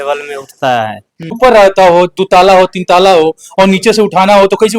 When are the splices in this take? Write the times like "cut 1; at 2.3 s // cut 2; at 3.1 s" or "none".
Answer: cut 1; at 1.4 s